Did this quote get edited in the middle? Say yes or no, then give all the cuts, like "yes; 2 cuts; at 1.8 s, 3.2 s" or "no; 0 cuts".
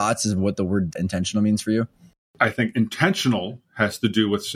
yes; 2 cuts; at 0.9 s, 2.3 s